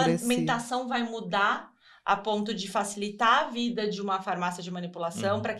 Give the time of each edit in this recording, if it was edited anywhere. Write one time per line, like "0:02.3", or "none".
none